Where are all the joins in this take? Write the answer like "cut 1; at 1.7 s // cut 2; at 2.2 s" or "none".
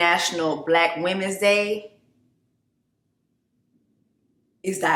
none